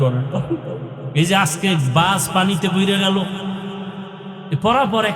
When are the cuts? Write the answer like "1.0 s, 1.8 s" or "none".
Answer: 1.0 s